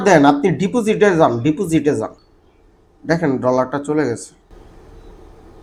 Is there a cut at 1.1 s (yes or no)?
no